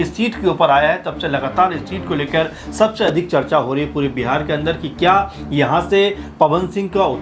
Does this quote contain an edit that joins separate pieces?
no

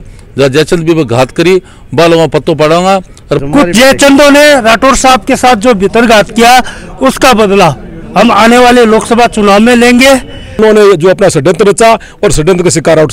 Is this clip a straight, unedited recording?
no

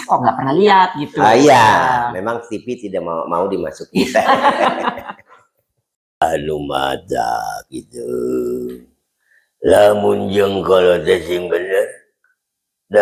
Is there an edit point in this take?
yes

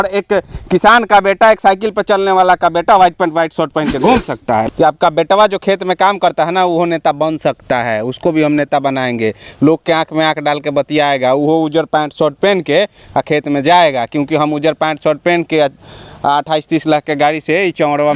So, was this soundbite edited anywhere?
yes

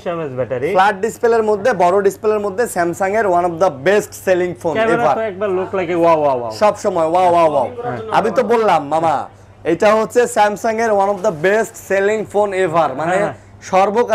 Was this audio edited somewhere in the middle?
no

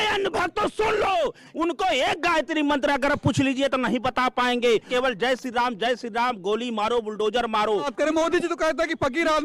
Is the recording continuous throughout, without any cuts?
no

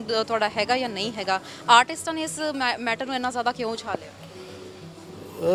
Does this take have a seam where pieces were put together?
no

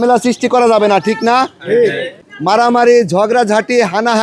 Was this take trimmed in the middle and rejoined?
yes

